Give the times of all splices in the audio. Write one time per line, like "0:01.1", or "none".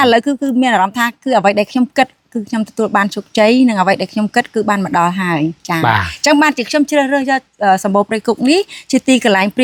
none

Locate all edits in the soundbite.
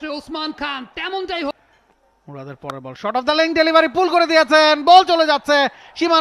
0:01.5

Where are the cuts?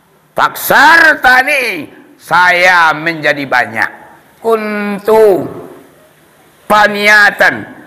0:04.4

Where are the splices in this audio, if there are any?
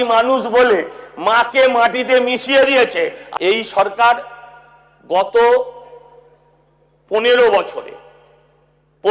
0:03.2

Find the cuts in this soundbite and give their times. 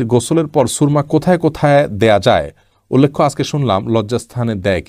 none

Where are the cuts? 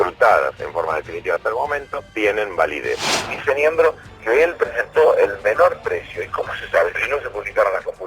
0:03.1
0:07.0

